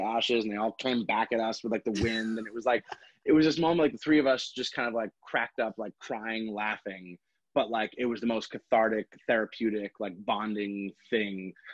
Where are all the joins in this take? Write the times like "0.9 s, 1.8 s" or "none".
none